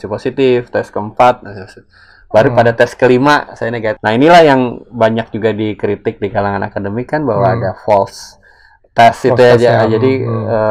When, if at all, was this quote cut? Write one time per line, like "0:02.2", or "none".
0:03.9